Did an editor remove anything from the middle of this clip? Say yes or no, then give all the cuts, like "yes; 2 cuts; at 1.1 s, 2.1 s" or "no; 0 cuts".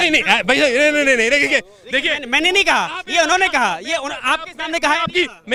no; 0 cuts